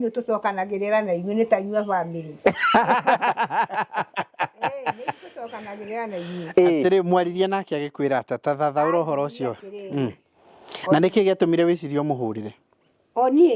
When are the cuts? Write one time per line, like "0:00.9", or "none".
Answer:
none